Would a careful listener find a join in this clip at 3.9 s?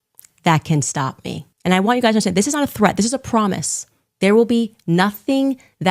no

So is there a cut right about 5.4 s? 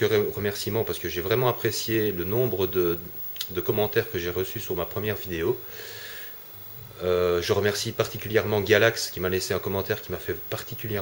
no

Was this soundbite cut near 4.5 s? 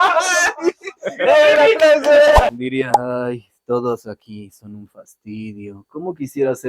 no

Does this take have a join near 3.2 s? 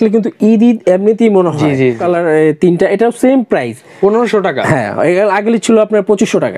no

